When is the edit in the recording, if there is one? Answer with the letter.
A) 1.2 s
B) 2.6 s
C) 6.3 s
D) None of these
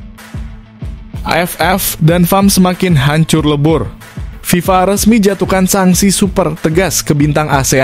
A